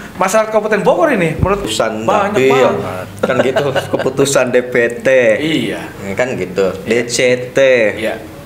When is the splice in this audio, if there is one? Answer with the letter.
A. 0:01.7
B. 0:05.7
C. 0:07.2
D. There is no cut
A